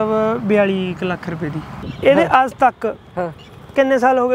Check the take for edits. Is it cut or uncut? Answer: cut